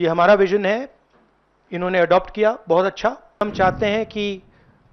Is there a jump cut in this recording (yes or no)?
yes